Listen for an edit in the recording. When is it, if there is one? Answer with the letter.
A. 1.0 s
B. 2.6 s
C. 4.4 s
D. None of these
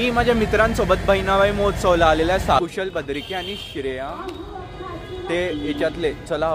B